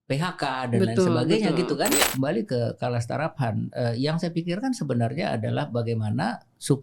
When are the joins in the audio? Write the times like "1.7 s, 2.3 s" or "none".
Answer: 2.1 s